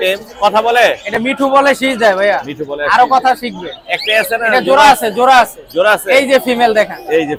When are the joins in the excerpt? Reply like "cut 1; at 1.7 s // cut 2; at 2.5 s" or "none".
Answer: none